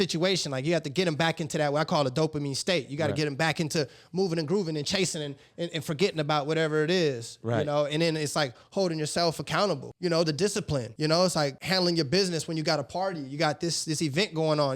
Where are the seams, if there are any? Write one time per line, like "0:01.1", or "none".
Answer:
0:09.9
0:10.9
0:11.6